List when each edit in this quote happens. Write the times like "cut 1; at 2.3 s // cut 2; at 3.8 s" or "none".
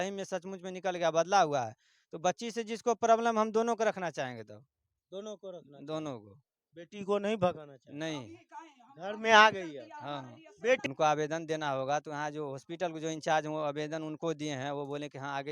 cut 1; at 10.8 s